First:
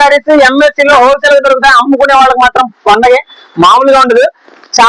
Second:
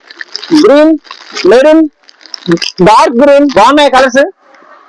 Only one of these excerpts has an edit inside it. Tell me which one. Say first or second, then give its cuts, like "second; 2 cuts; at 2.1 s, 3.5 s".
second; 1 cut; at 3.5 s